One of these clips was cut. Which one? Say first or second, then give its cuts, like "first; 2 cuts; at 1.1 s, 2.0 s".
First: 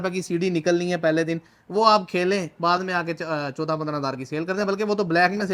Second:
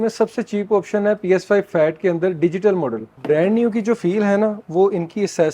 second; 1 cut; at 3.1 s